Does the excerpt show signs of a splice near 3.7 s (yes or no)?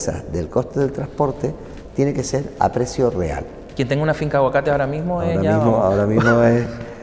yes